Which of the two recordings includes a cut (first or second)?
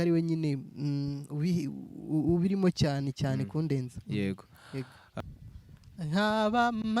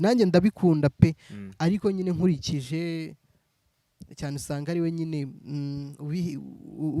first